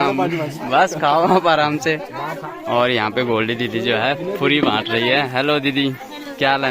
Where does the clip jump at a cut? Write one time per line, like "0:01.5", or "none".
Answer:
0:02.4